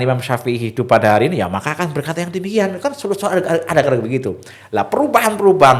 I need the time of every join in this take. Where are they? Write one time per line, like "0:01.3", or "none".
none